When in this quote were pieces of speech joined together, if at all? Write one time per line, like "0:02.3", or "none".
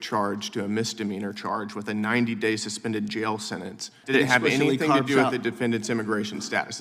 0:03.9